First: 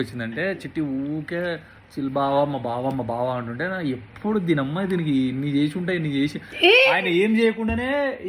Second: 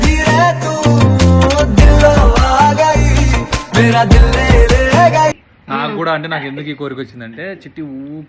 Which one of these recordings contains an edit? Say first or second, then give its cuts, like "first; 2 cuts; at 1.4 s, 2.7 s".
second; 1 cut; at 5.5 s